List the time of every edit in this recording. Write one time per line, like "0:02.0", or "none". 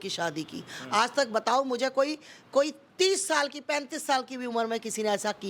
none